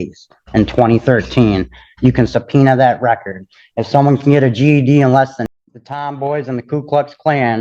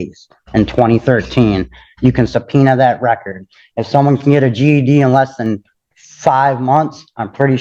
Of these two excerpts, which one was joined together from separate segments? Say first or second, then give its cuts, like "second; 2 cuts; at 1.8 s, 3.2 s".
first; 1 cut; at 5.4 s